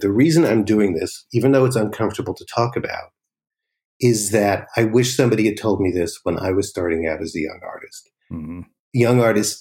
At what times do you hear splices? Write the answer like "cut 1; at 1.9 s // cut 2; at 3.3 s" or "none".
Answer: none